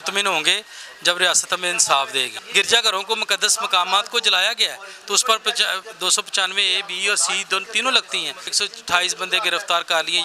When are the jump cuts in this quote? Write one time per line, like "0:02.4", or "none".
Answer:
0:02.3
0:08.5

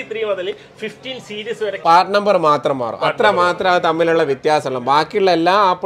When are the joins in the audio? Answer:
0:01.8

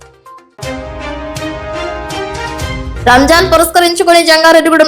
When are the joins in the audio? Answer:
0:02.9

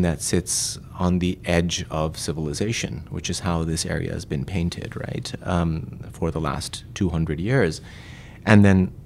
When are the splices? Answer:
none

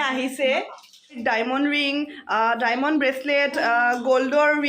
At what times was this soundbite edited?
0:01.2

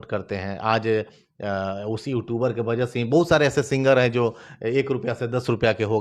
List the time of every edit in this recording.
none

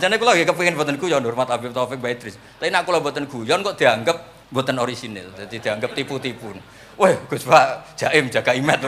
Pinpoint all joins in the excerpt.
0:04.3

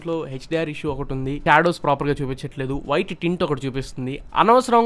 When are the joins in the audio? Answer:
none

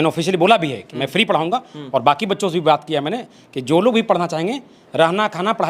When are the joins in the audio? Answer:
none

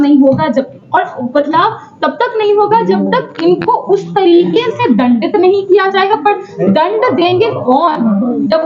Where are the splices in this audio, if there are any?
none

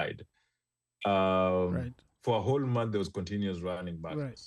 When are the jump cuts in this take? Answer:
none

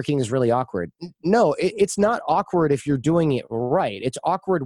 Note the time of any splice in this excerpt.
none

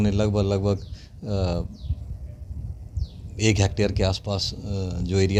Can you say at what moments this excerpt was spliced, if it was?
none

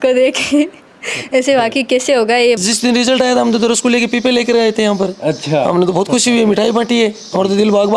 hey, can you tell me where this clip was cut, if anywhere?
0:02.6

